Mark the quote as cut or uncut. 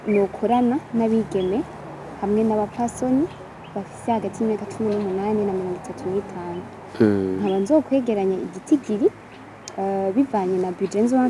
uncut